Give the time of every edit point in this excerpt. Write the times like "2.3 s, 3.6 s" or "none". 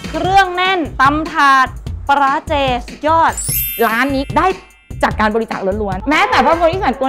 none

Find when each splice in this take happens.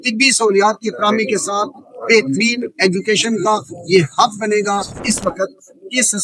5.0 s

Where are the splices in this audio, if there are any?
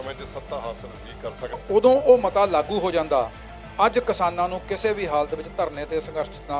1.6 s

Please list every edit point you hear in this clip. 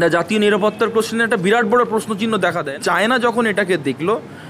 2.7 s

